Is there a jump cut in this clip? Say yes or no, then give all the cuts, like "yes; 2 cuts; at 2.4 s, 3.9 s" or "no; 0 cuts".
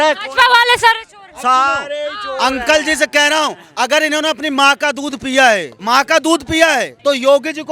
yes; 2 cuts; at 5.7 s, 6.9 s